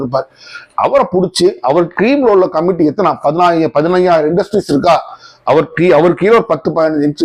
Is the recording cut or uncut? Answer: uncut